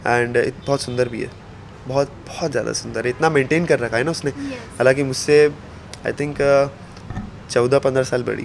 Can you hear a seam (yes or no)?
no